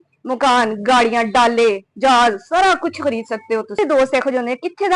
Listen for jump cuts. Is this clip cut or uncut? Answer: cut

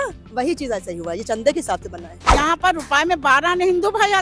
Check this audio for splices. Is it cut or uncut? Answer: cut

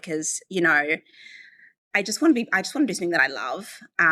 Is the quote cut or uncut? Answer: uncut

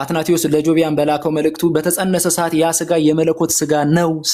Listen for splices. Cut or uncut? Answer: uncut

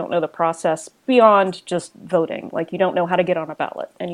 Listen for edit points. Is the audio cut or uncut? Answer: uncut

